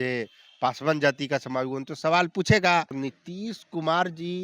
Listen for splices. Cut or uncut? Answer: cut